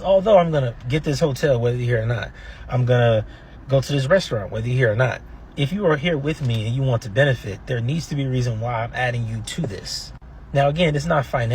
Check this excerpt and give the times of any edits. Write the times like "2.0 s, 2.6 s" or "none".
10.0 s